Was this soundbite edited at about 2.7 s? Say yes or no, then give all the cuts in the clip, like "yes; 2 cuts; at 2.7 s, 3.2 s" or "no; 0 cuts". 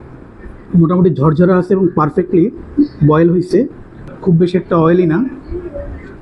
no; 1 cut; at 4.1 s